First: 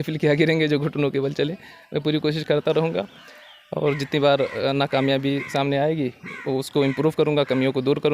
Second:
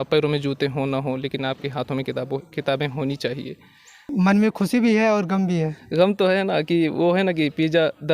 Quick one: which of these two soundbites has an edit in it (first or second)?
second